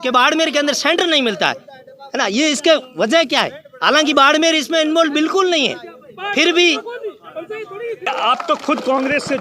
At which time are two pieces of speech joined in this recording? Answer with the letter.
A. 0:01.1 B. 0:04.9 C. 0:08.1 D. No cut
C